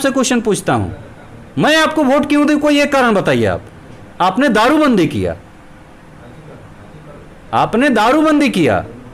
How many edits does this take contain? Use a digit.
0